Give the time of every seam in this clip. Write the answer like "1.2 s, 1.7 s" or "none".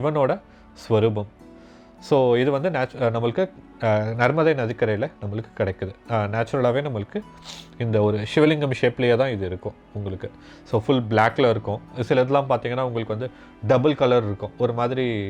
none